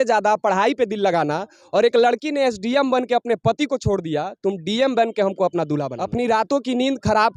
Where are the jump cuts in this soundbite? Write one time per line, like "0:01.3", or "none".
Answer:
0:06.0

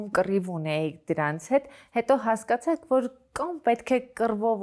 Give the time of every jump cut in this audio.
none

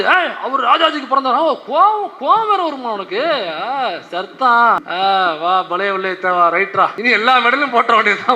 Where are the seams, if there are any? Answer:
0:04.9
0:07.0

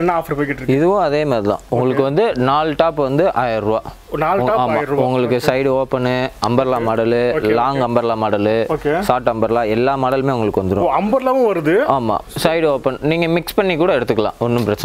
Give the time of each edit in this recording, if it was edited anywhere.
none

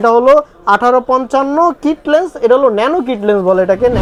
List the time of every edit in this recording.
none

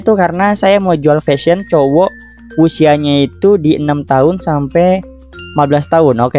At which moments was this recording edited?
none

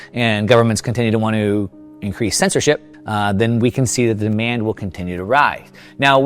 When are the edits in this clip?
0:03.0

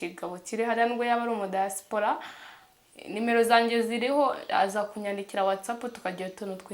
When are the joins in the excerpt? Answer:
none

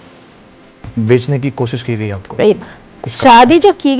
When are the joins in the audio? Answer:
0:03.0

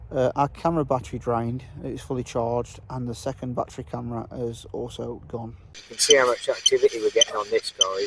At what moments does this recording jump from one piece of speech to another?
0:05.9

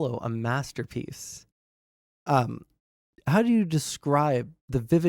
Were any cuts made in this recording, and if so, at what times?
0:03.1

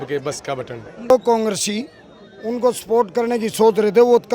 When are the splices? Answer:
0:01.1

